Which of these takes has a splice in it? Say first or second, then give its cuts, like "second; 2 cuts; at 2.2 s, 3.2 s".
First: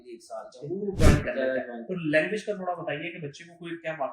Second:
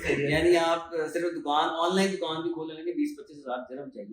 first; 1 cut; at 1.1 s